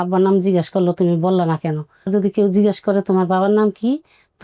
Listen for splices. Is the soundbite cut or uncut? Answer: cut